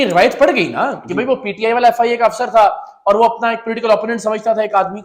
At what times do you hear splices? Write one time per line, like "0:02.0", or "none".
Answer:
none